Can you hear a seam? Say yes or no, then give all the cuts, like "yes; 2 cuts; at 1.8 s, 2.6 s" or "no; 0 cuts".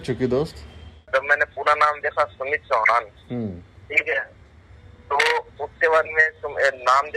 yes; 1 cut; at 1.1 s